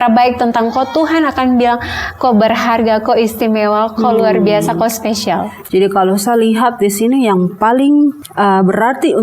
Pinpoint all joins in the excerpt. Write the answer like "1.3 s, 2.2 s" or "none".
5.5 s, 8.2 s